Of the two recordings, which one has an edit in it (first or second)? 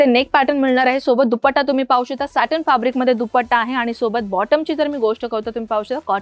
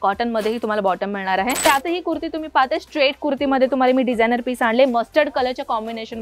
second